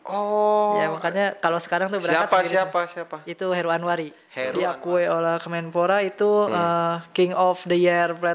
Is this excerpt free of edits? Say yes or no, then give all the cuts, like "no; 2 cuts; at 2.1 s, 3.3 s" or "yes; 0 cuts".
no; 1 cut; at 4.2 s